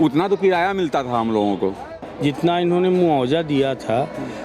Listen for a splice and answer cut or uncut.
cut